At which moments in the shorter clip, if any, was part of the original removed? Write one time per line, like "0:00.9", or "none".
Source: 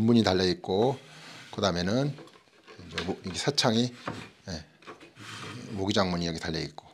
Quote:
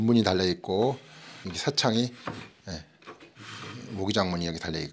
0:01.5